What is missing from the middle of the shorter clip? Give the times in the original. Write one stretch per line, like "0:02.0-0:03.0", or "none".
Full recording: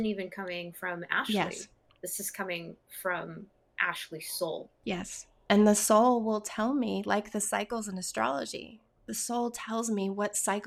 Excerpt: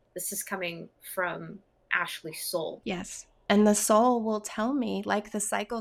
0:04.7-0:04.8